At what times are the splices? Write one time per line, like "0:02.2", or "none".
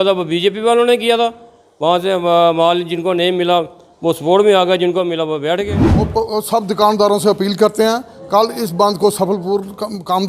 0:06.1